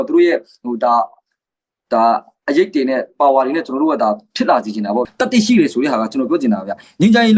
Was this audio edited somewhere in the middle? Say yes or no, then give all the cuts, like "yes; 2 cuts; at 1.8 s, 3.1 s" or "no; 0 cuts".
yes; 1 cut; at 5.1 s